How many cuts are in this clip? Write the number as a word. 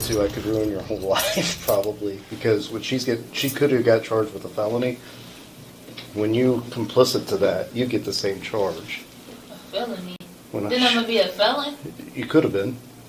zero